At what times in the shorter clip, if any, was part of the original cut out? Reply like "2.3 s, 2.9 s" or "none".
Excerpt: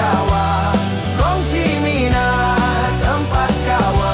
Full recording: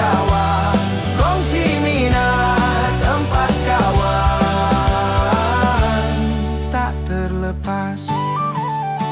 none